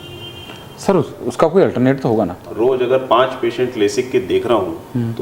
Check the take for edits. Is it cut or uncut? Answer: cut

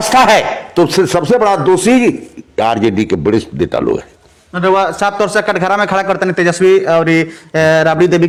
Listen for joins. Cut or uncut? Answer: uncut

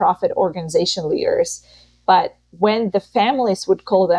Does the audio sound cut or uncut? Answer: uncut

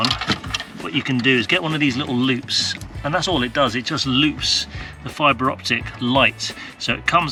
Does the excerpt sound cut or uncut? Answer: uncut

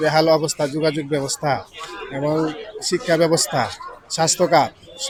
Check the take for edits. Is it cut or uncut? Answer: uncut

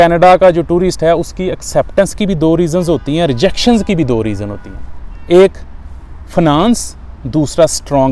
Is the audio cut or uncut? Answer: uncut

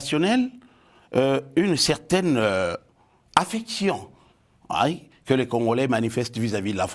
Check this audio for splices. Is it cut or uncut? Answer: uncut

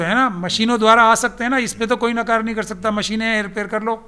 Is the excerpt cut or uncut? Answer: uncut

